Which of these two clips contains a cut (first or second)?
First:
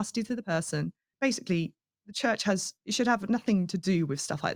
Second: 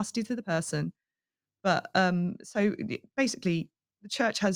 first